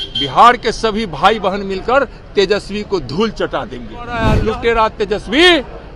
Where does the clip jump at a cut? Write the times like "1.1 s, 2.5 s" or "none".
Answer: 4.3 s